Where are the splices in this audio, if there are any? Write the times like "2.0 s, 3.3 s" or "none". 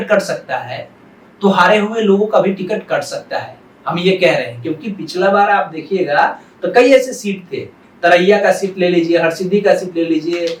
none